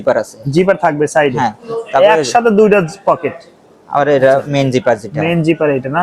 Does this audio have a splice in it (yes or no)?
no